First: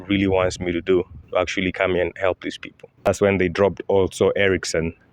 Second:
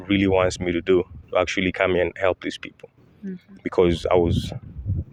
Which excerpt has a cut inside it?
first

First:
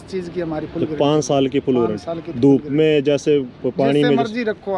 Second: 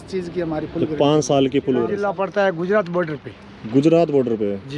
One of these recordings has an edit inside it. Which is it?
second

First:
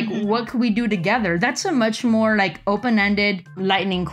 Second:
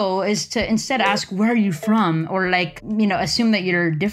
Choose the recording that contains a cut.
second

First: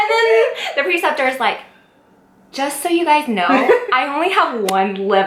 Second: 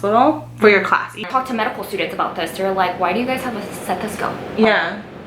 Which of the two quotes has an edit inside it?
second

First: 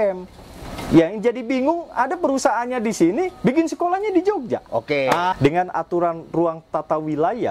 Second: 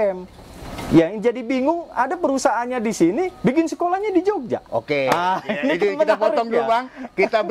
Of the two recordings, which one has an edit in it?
first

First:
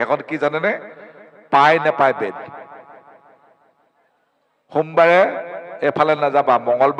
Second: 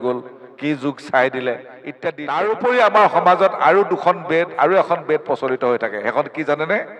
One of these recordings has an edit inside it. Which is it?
second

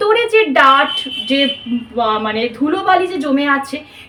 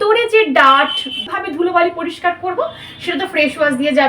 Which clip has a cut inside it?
second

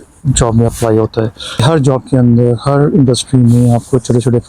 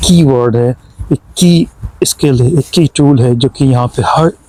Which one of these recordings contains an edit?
first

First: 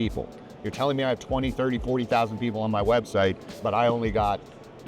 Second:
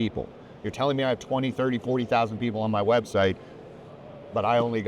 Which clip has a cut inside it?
first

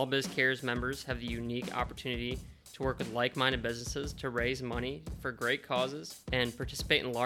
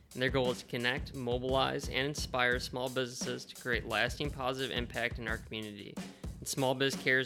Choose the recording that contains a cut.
first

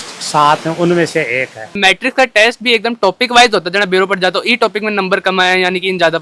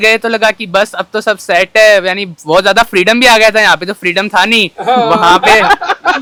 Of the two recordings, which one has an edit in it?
first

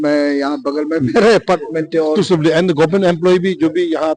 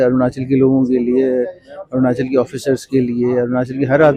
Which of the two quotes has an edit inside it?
first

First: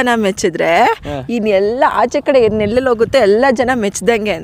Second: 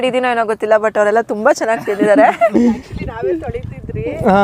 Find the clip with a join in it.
second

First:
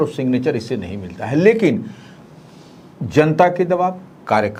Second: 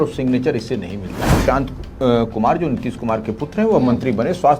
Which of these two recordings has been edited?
second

